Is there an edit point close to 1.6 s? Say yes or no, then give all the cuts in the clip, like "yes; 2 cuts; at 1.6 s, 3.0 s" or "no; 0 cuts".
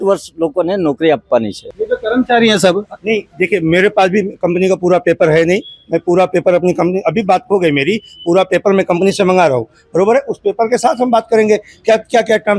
yes; 1 cut; at 1.6 s